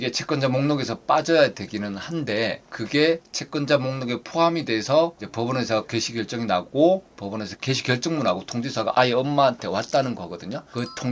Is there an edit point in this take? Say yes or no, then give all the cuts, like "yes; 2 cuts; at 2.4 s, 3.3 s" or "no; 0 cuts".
no; 0 cuts